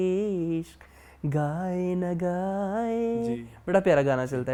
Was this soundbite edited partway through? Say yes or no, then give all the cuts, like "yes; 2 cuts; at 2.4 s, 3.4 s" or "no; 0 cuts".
no; 0 cuts